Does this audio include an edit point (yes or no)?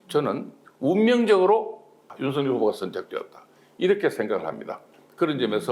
yes